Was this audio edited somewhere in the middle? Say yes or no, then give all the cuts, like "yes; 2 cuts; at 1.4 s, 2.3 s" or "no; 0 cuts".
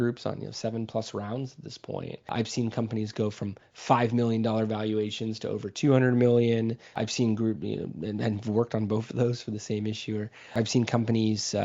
yes; 3 cuts; at 2.3 s, 7.0 s, 10.5 s